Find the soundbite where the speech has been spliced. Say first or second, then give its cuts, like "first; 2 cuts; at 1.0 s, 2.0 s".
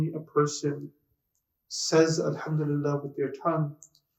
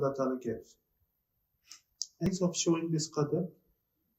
second; 1 cut; at 2.3 s